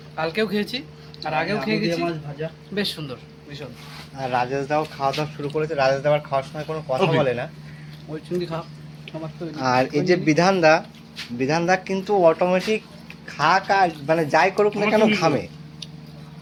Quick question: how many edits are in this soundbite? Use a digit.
0